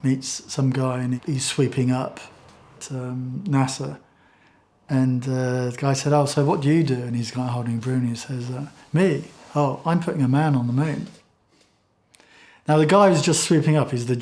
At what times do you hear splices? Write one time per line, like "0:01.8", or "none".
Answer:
0:01.2